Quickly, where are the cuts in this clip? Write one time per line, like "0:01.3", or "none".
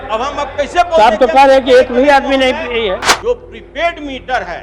0:03.0